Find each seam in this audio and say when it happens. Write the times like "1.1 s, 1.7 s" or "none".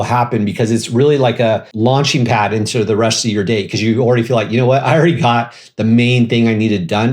1.7 s